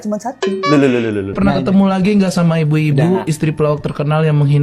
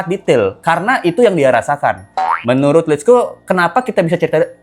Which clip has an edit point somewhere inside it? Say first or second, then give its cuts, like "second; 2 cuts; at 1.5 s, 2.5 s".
first; 1 cut; at 1.4 s